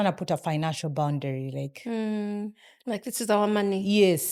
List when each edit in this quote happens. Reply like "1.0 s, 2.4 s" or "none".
none